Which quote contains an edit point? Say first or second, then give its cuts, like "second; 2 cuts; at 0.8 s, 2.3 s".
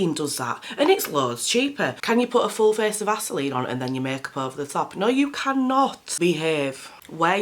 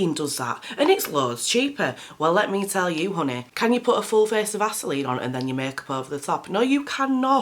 first; 2 cuts; at 2.0 s, 6.0 s